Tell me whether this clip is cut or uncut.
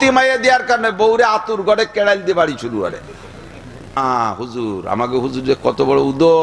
cut